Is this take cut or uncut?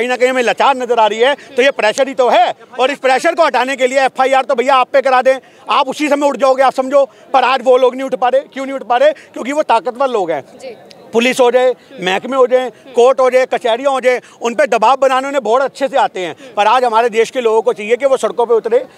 uncut